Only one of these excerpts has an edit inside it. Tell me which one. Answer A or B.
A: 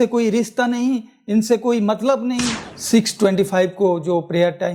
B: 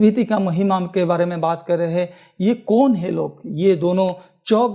A